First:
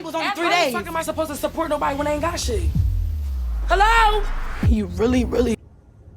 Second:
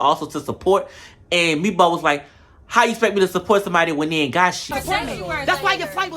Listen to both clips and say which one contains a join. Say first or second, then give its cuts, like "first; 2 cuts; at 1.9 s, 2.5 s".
second; 1 cut; at 4.6 s